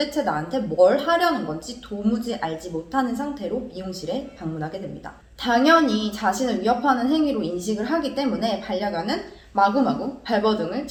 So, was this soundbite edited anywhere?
no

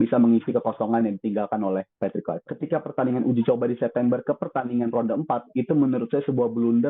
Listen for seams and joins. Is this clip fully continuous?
no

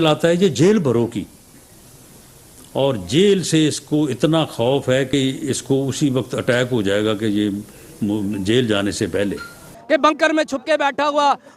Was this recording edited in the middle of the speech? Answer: yes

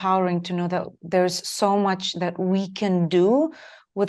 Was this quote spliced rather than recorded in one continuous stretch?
no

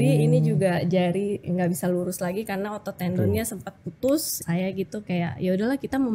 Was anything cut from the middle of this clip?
yes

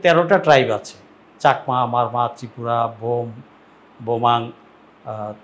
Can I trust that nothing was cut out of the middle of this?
yes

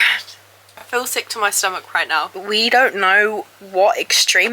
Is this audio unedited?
no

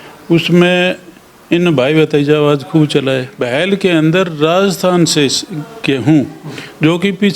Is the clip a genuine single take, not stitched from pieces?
no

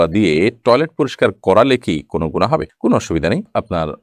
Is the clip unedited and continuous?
yes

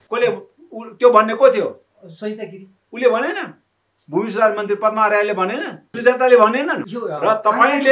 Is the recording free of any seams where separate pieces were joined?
no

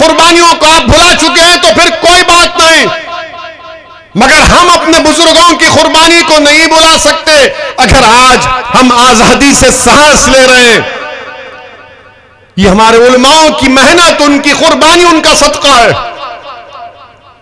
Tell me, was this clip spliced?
no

